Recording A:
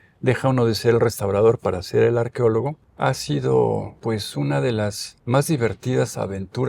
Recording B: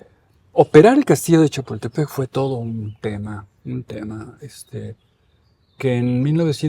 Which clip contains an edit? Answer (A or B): A